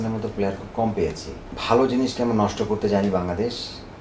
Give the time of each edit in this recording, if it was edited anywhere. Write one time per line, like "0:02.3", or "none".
0:01.5